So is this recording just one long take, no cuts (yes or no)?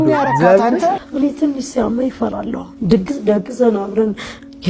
no